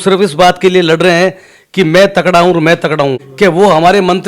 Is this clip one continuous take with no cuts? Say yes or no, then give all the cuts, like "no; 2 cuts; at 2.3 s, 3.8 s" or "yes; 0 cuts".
no; 1 cut; at 3.2 s